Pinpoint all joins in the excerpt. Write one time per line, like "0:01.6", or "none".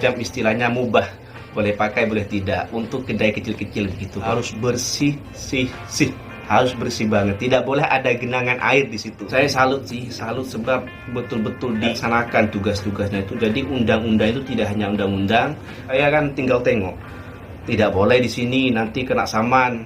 0:04.3
0:09.2
0:11.9
0:15.8